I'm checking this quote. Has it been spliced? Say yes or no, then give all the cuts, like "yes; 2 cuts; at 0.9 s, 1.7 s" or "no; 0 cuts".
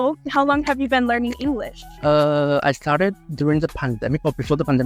no; 0 cuts